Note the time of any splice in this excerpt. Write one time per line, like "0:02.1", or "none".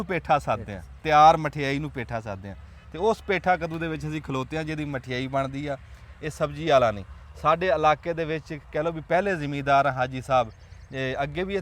none